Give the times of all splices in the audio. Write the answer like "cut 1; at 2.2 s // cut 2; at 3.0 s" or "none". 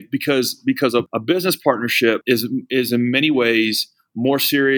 cut 1; at 1.1 s // cut 2; at 2.2 s